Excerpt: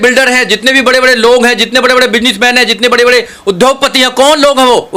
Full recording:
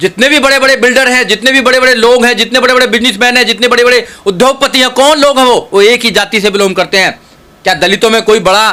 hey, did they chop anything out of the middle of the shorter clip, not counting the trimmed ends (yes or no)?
no